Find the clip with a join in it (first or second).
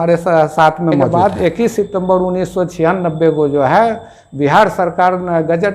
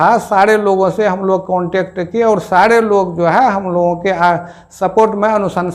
first